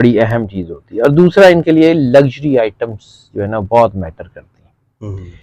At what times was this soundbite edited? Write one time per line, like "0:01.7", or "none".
none